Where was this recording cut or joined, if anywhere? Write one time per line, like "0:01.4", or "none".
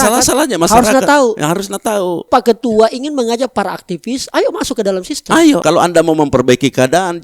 0:02.3
0:05.6

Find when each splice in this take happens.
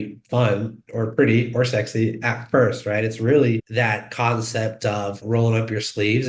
0:03.7
0:05.2

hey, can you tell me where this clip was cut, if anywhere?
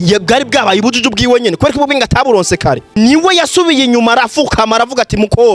0:02.9

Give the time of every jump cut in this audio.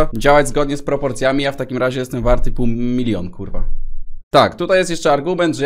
none

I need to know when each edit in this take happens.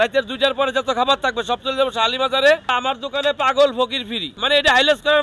0:02.7
0:04.3

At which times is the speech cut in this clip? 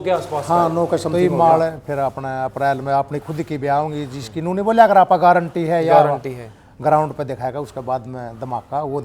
0:01.1

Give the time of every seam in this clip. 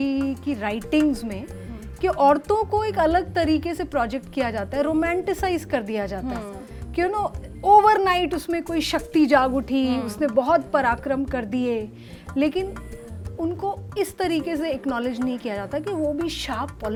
none

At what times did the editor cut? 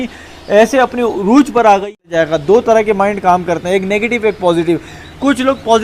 0:02.0

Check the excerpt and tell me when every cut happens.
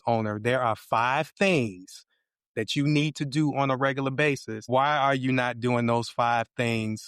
0:04.5

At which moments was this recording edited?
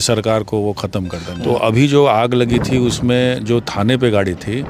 0:01.4

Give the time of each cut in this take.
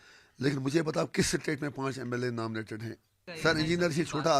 0:03.2

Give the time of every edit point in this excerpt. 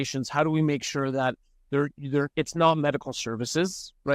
none

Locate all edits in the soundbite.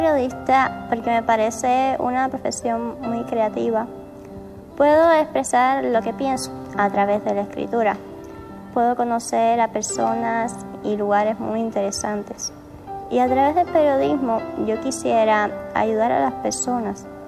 none

